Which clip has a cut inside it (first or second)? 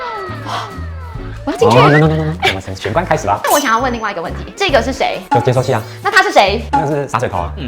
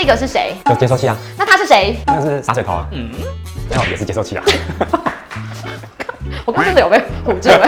first